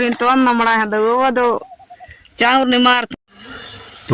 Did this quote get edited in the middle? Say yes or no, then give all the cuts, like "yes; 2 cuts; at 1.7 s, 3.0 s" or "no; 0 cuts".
yes; 1 cut; at 3.0 s